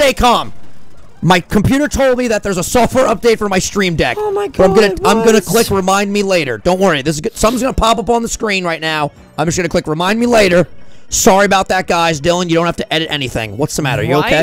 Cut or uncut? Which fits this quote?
uncut